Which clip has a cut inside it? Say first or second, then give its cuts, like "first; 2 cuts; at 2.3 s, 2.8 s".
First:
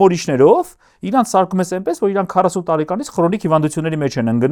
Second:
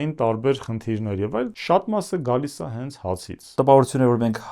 second; 2 cuts; at 1.6 s, 3.4 s